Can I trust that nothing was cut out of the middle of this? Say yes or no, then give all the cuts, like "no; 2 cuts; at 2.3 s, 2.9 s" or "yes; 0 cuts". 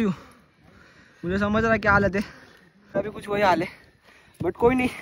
no; 1 cut; at 3.2 s